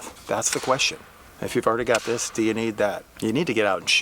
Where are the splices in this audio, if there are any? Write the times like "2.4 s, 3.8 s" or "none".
3.1 s

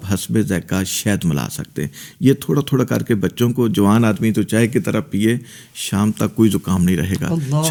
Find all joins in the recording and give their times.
none

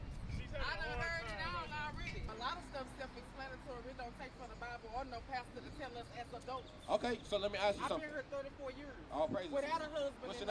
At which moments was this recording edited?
2.3 s

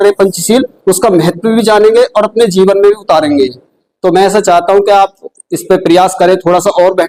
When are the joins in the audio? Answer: none

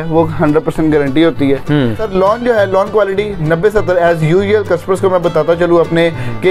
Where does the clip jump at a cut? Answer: 2.0 s

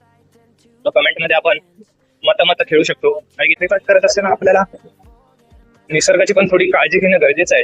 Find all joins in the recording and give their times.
3.6 s

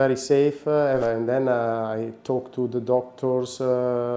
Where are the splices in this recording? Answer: 1.0 s

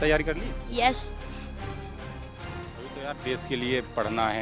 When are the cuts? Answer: none

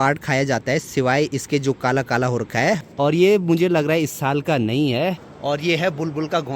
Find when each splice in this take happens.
2.9 s, 5.2 s

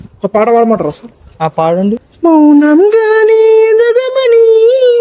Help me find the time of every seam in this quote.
2.0 s

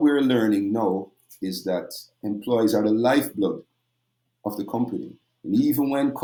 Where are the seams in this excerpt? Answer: none

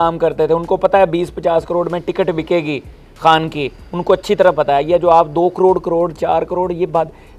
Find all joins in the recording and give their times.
none

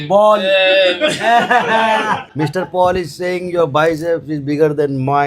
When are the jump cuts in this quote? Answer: 2.3 s

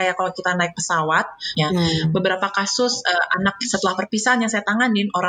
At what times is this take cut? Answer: 1.5 s

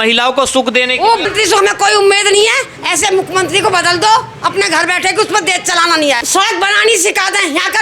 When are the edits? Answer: 1.2 s, 6.2 s

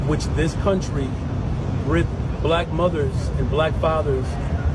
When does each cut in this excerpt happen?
none

